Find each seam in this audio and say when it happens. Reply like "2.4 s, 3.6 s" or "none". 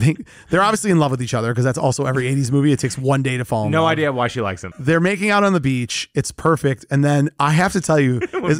4.6 s